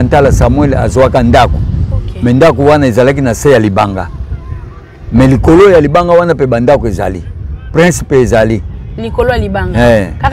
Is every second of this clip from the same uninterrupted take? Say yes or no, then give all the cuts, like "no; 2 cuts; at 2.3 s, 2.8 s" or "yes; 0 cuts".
yes; 0 cuts